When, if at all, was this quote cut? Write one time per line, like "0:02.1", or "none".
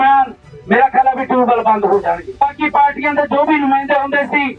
0:02.4